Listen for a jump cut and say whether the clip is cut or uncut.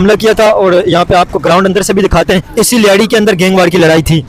cut